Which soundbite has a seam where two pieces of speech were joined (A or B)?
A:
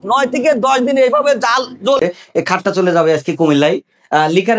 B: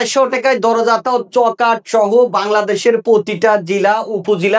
A